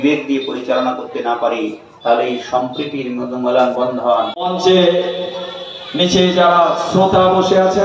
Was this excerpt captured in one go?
no; 1 cut; at 4.3 s

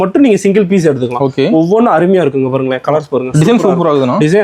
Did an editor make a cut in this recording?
no; 0 cuts

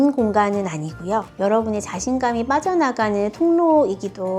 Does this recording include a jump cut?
no; 0 cuts

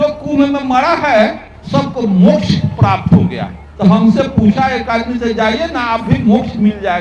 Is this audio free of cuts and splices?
yes; 0 cuts

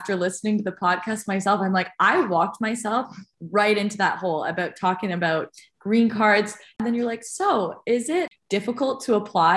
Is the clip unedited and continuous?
no; 2 cuts; at 6.8 s, 8.3 s

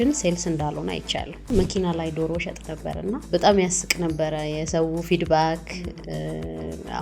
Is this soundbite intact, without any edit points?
no; 2 cuts; at 1.5 s, 3.2 s

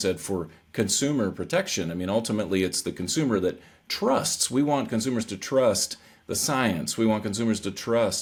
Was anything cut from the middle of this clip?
no; 0 cuts

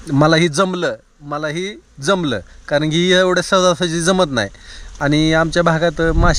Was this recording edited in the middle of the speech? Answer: no; 0 cuts

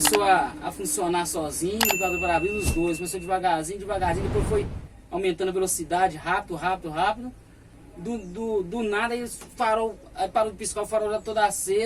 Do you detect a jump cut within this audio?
no; 0 cuts

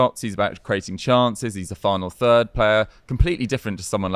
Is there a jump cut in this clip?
no; 0 cuts

